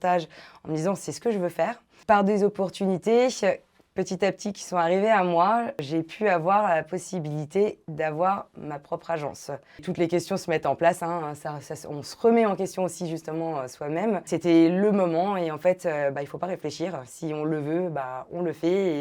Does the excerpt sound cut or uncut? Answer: cut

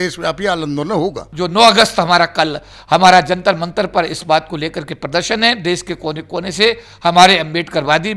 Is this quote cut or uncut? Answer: cut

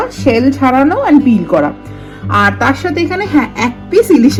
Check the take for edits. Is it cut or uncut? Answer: uncut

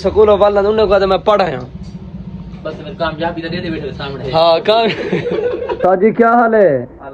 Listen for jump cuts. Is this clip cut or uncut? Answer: cut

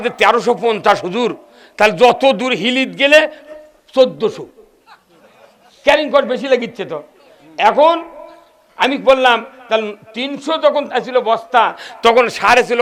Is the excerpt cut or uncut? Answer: uncut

